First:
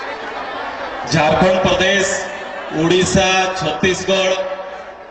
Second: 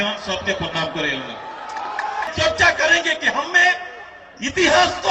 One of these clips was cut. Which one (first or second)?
second